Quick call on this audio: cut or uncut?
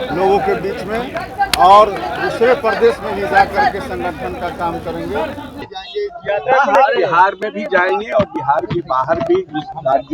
cut